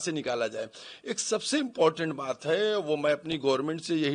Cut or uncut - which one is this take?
uncut